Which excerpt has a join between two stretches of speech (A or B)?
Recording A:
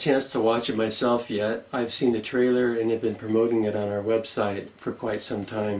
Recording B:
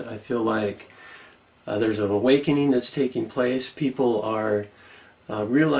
A